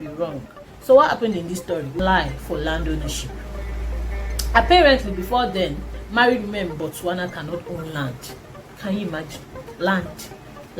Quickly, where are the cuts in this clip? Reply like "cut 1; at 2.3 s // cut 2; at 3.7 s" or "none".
cut 1; at 1.9 s